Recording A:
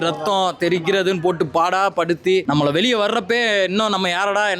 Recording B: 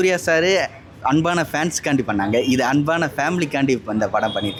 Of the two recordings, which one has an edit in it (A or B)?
A